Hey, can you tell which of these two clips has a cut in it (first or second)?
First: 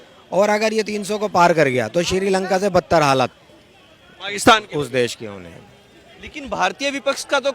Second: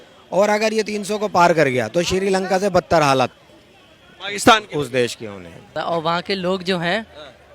second